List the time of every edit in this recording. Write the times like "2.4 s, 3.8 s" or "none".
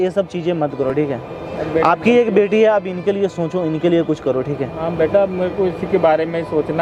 none